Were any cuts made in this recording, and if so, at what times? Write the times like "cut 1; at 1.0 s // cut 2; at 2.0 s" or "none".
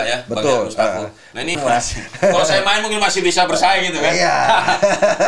cut 1; at 1.5 s